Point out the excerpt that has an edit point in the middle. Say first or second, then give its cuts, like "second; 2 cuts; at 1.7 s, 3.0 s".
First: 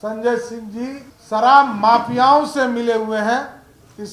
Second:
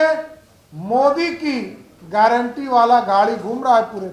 first; 1 cut; at 1.1 s